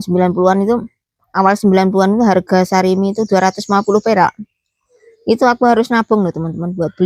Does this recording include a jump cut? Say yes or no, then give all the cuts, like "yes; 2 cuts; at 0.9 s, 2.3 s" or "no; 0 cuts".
no; 0 cuts